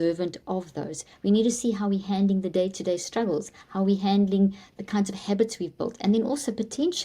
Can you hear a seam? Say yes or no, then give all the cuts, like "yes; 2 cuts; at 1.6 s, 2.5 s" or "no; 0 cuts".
no; 0 cuts